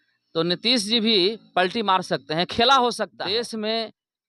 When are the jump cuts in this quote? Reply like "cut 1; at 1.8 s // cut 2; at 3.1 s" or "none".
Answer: cut 1; at 3.2 s